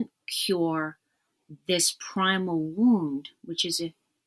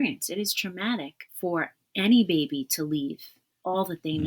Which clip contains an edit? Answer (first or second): second